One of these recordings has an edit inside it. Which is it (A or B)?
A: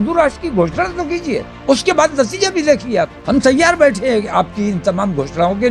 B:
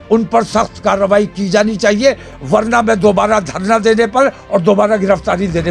A